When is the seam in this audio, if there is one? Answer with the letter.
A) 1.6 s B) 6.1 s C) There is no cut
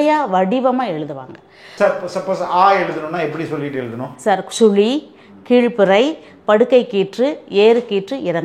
A